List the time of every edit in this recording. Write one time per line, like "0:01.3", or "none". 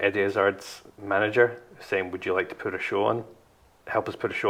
none